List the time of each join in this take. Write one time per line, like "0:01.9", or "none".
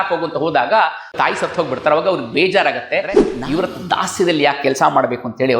0:01.1
0:03.3